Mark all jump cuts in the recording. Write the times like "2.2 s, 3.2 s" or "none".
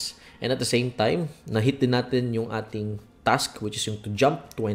none

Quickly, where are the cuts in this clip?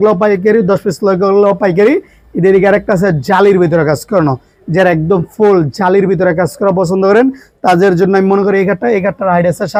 none

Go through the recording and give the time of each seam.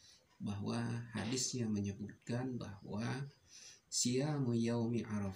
none

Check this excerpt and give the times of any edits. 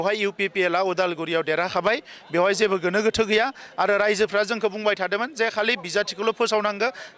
none

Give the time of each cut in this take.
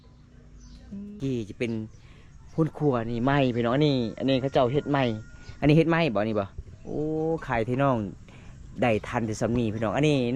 1.2 s

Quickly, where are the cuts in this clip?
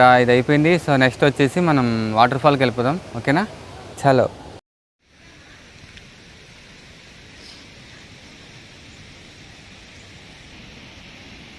none

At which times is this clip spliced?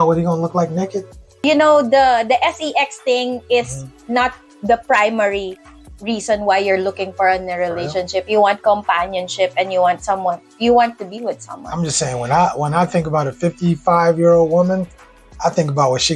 none

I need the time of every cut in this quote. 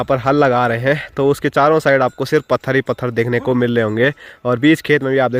none

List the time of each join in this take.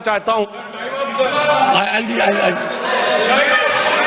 none

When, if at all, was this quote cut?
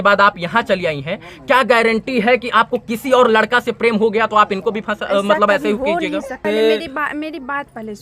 6.4 s

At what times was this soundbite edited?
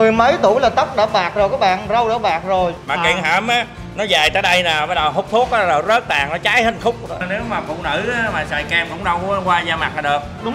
2.8 s, 7.2 s

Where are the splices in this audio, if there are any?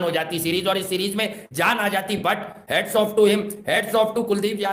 none

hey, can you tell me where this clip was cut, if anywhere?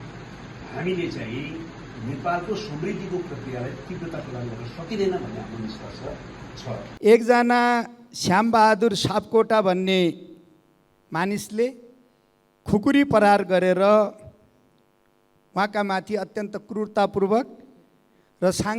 6.9 s

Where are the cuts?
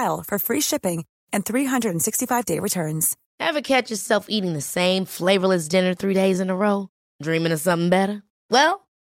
3.2 s

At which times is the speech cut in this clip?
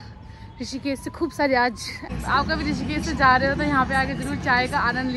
2.0 s

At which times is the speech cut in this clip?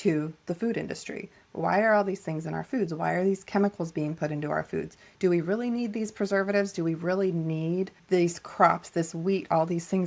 8.0 s

